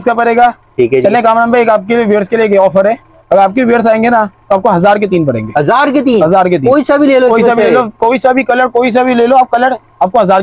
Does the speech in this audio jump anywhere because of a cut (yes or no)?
no